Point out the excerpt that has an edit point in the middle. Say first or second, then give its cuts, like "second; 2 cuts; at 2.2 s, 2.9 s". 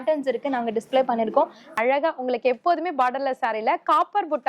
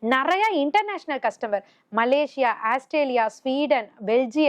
first; 1 cut; at 1.7 s